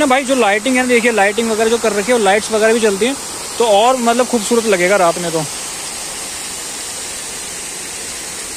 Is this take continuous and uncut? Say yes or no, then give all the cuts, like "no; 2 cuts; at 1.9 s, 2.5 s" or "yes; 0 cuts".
yes; 0 cuts